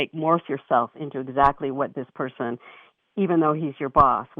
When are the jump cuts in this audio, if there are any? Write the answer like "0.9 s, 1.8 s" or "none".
none